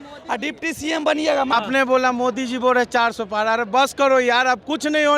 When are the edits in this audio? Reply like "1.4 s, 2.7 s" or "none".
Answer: 1.5 s

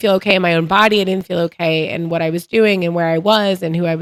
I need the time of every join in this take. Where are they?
none

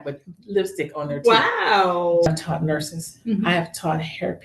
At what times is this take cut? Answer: 2.3 s

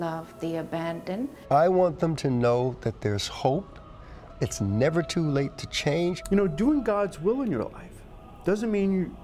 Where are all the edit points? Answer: 1.4 s, 6.2 s

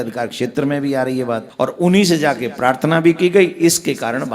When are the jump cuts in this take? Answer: 1.5 s

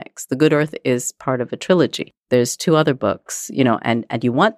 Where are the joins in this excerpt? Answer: 2.1 s

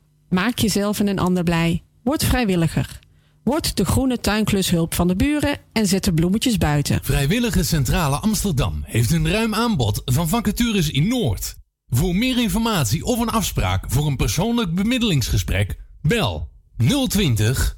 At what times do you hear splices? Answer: 7.0 s

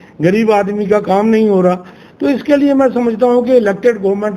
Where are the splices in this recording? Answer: none

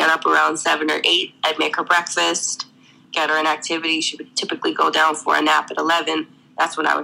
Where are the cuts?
none

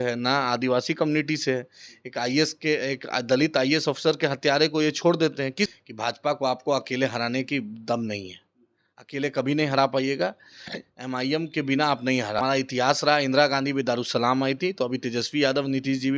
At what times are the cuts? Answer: 5.7 s, 12.4 s

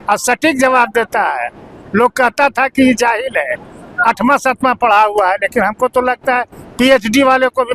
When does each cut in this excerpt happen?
none

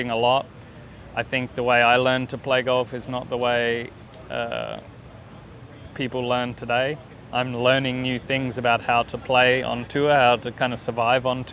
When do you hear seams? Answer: 7.2 s

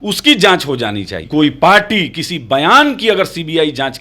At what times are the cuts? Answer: 1.1 s

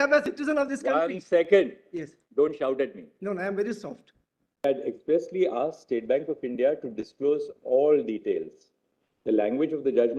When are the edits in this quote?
4.6 s

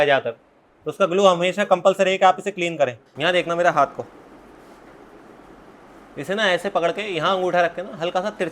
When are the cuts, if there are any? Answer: 3.1 s

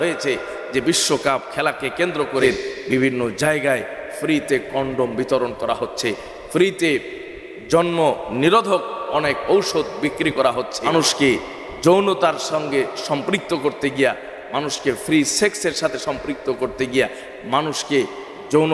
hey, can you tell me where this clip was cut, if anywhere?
2.4 s, 10.8 s

